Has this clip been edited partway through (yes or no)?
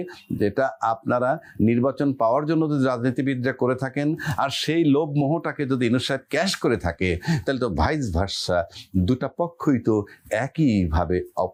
no